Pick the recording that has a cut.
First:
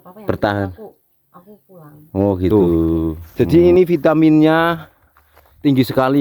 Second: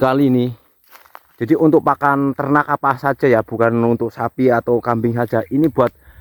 first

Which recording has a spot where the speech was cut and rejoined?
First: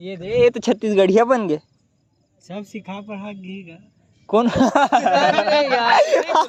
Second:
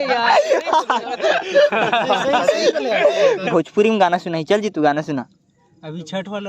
second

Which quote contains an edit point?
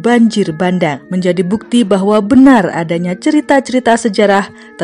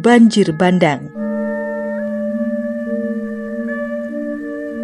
first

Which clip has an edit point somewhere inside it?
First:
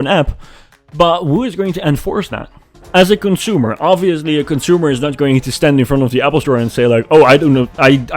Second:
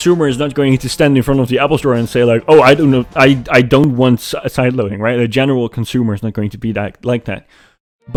first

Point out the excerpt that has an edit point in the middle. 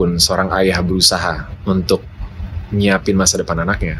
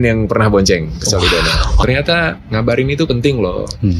second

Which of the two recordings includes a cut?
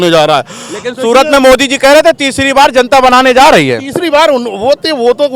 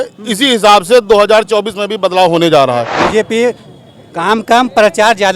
second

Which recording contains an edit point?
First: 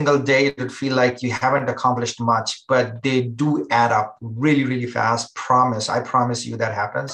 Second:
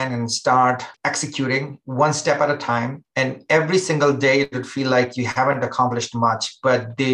second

